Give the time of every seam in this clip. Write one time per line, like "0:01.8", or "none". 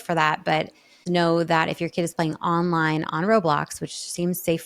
0:01.0